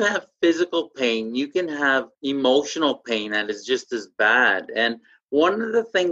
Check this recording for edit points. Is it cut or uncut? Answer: cut